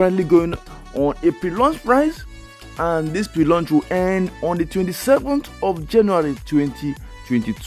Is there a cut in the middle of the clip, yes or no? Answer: no